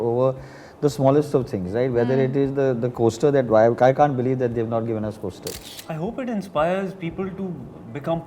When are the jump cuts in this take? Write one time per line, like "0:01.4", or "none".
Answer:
0:05.7

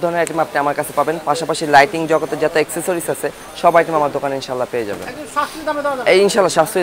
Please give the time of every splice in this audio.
none

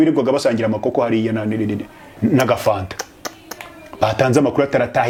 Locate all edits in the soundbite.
none

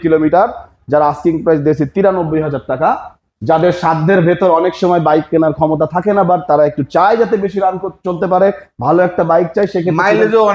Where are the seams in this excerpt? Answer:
none

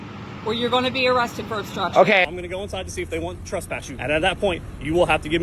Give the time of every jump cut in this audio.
0:02.2
0:03.9

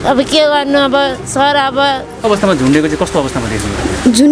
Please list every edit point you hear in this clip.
0:02.2

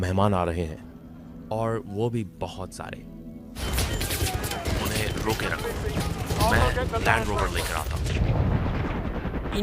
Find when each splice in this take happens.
0:03.6

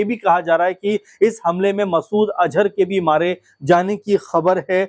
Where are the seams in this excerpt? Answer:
none

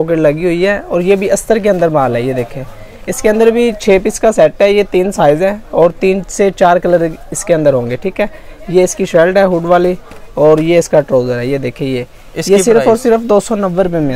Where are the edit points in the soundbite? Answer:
none

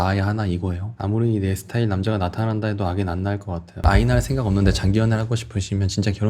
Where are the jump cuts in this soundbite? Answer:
0:00.8
0:03.7

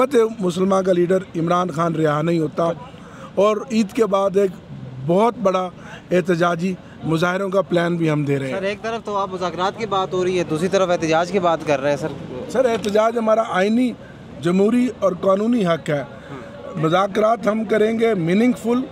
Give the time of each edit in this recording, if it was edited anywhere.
none

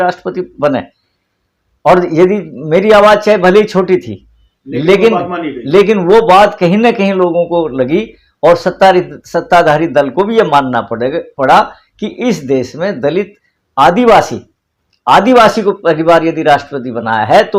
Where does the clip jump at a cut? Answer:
none

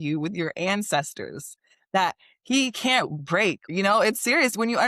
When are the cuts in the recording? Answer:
0:03.7

